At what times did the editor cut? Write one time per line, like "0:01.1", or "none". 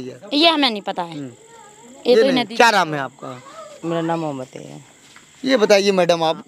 none